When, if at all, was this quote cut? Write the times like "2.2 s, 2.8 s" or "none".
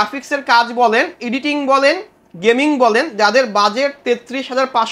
none